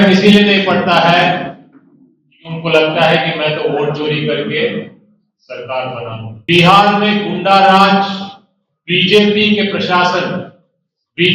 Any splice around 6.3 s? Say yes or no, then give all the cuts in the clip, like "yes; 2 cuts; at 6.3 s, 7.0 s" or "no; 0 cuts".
yes; 1 cut; at 6.3 s